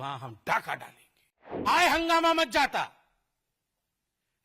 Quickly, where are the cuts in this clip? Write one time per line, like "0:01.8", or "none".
0:01.7